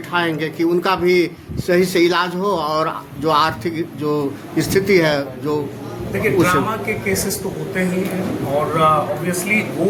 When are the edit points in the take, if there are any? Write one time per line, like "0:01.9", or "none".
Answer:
none